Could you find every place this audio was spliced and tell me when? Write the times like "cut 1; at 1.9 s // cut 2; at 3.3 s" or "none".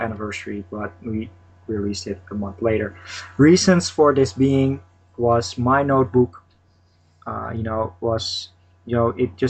none